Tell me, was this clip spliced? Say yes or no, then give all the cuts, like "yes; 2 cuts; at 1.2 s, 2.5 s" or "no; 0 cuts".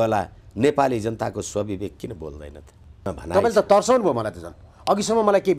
yes; 1 cut; at 3.1 s